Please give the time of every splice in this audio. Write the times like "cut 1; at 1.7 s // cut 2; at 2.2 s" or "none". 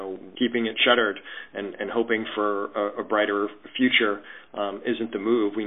none